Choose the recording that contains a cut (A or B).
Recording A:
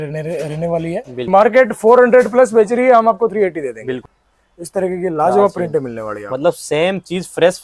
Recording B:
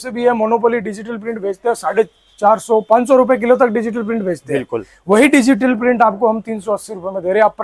A